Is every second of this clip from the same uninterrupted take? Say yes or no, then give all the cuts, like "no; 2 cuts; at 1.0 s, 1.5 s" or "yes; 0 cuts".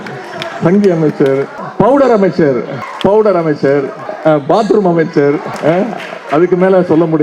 no; 4 cuts; at 1.6 s, 2.8 s, 4.0 s, 5.5 s